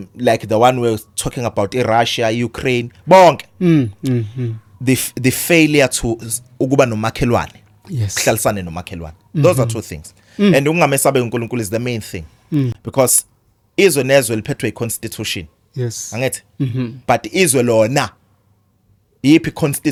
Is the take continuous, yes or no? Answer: yes